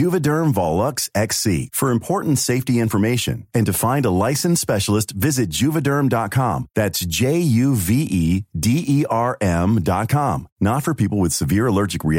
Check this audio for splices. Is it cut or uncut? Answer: uncut